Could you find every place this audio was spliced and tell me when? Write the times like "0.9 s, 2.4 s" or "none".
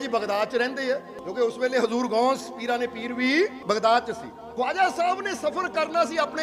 1.2 s, 3.6 s, 4.4 s